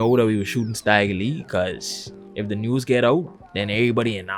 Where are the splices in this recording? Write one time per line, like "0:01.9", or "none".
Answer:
none